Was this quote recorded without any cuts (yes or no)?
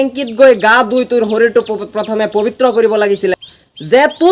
no